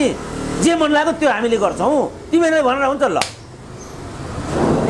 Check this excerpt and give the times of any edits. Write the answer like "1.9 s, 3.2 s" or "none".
none